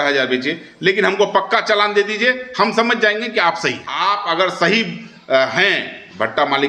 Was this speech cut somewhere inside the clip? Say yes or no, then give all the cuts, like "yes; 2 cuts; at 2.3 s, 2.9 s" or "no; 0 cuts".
yes; 1 cut; at 3.9 s